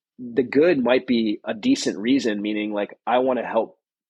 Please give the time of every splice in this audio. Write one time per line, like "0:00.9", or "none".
none